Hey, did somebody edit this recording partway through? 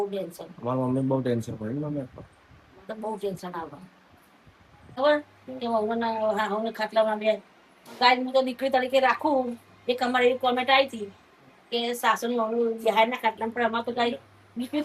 yes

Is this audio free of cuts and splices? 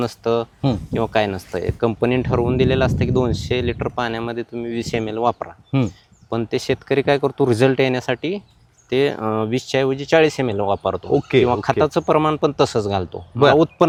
yes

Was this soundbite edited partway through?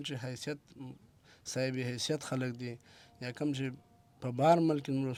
no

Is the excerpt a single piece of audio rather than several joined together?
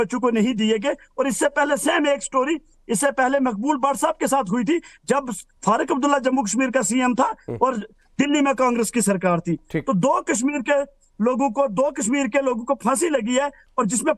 yes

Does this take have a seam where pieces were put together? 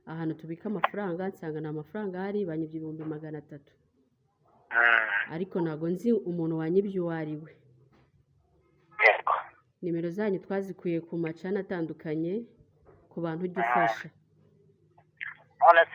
no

